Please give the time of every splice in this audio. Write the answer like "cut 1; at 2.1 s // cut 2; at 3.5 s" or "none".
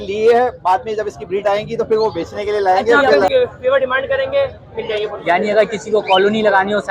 cut 1; at 3.3 s